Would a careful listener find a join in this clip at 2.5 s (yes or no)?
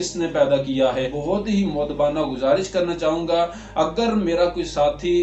no